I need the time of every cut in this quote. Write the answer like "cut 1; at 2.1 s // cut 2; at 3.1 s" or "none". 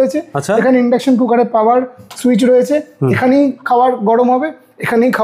none